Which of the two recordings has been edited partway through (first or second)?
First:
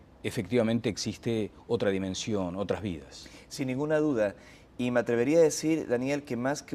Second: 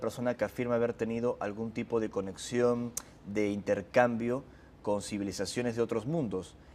second